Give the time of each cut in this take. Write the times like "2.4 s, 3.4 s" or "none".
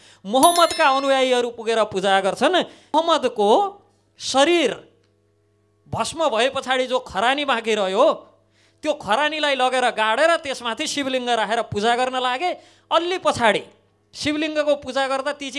2.8 s